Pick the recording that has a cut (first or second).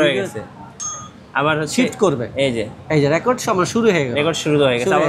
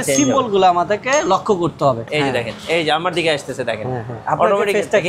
second